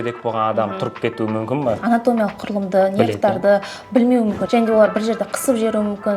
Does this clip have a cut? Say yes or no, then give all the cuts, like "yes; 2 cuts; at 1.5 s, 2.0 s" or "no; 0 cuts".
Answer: yes; 2 cuts; at 1.8 s, 4.4 s